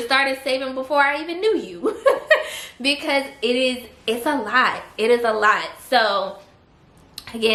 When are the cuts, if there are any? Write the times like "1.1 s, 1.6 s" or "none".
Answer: none